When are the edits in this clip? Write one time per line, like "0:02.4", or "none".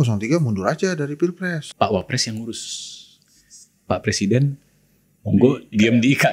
0:01.6